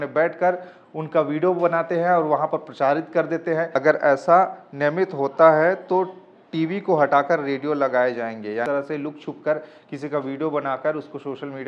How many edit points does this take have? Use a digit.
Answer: 2